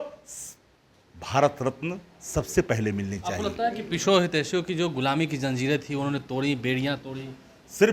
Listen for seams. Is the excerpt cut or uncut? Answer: uncut